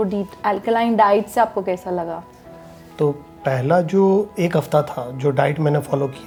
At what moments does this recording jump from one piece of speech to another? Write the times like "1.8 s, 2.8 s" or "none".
none